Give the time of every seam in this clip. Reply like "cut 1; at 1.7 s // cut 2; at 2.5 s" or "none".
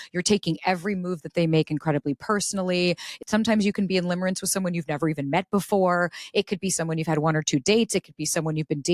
cut 1; at 3.2 s

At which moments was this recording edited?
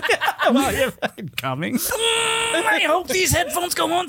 cut 1; at 1.9 s

